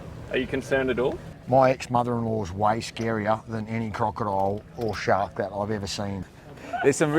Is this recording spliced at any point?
yes; 1 cut; at 6.2 s

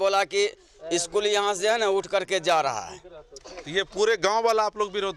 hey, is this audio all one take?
yes; 0 cuts

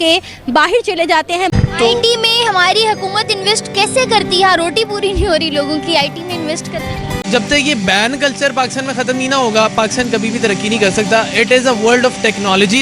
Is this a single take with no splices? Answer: no; 2 cuts; at 1.5 s, 7.2 s

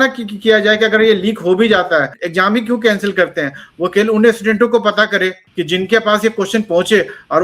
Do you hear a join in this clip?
yes; 2 cuts; at 2.2 s, 5.4 s

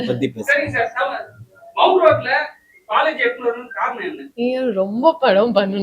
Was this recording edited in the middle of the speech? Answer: yes; 1 cut; at 4.2 s

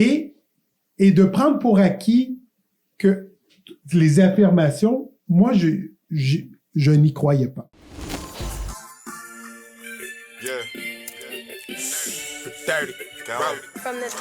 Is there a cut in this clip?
yes; 1 cut; at 7.8 s

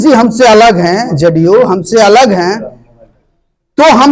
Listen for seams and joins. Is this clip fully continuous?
yes; 0 cuts

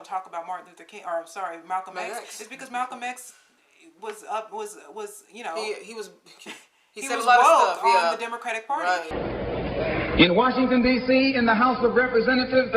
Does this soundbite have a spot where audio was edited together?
yes; 1 cut; at 9.1 s

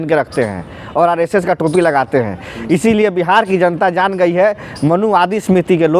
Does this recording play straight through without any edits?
yes; 0 cuts

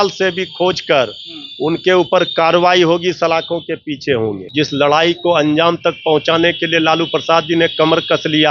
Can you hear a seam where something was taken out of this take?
yes; 1 cut; at 4.4 s

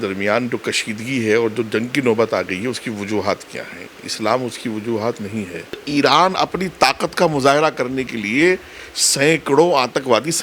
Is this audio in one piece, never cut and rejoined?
no; 1 cut; at 5.8 s

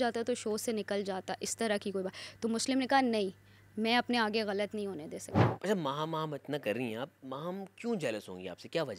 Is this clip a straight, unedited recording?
no; 1 cut; at 5.5 s

